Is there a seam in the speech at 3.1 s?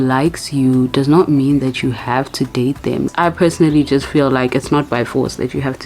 yes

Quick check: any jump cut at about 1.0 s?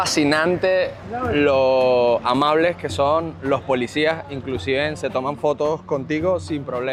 no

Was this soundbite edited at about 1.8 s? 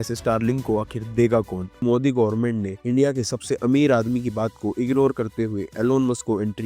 yes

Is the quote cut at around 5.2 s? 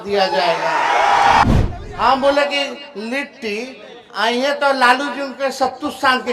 no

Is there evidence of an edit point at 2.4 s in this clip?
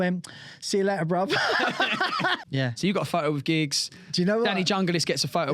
yes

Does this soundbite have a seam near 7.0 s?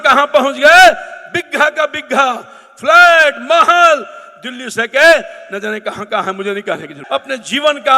yes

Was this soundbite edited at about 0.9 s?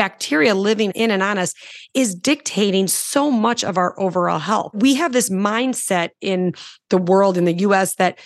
yes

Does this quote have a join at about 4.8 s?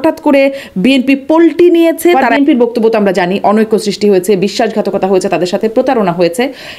no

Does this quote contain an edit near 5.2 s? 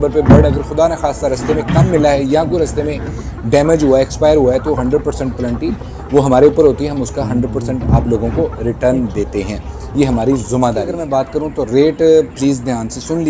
no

